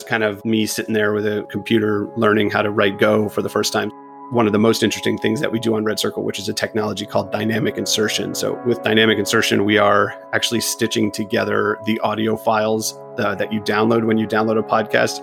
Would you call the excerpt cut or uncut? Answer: cut